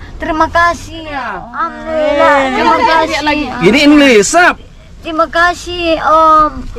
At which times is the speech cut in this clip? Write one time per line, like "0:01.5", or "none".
0:01.4